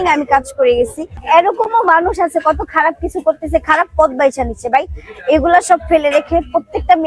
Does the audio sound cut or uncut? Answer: cut